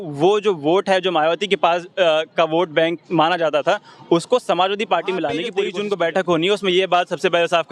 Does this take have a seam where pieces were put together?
yes; 1 cut; at 5.5 s

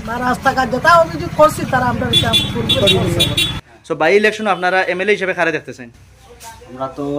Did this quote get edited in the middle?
no; 0 cuts

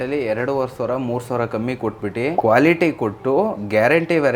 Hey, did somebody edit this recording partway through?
yes; 1 cut; at 2.4 s

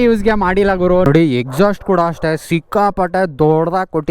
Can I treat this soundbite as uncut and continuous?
no; 1 cut; at 1.0 s

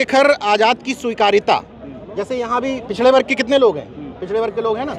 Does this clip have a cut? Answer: no; 0 cuts

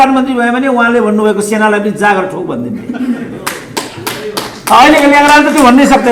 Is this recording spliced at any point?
no; 0 cuts

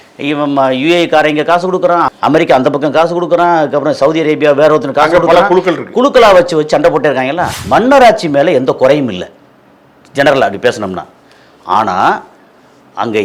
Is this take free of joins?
no; 2 cuts; at 2.1 s, 7.5 s

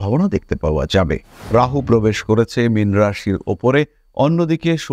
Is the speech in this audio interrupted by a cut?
yes; 1 cut; at 1.3 s

